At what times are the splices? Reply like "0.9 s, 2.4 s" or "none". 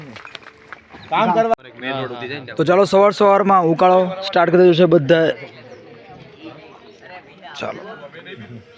1.5 s